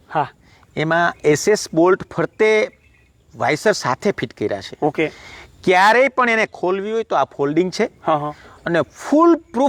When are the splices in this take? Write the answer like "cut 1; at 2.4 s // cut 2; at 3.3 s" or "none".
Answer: none